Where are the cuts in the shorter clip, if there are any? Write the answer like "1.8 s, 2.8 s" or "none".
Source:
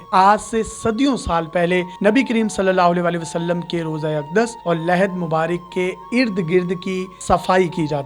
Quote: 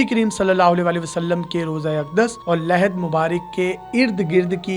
none